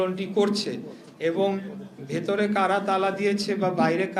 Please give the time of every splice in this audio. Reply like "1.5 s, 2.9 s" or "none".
none